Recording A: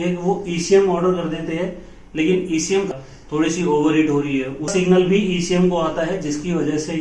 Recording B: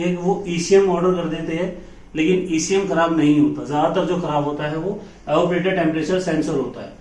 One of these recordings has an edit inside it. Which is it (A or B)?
A